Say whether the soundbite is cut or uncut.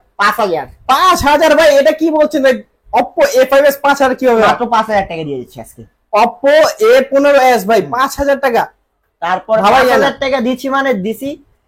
uncut